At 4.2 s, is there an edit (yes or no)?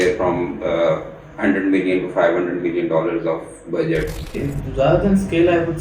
yes